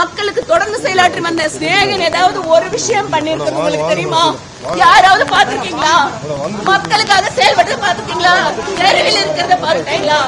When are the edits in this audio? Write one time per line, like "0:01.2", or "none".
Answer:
none